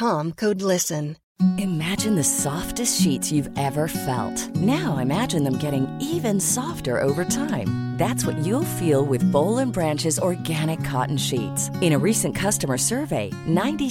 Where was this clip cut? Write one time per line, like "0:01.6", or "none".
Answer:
0:01.2